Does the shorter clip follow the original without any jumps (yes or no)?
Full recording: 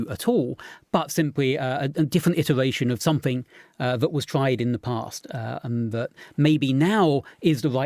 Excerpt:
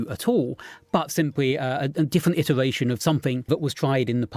no